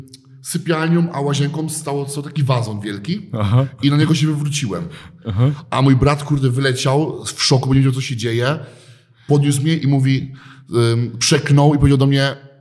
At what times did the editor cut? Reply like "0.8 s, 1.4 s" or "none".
none